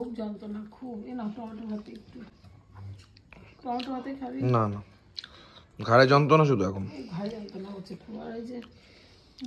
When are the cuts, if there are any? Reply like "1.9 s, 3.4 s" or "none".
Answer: none